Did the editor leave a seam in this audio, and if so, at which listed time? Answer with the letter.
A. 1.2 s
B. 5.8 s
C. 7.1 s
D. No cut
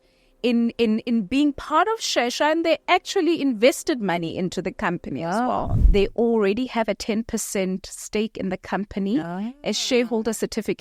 B